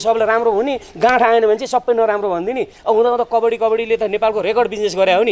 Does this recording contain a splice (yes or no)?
no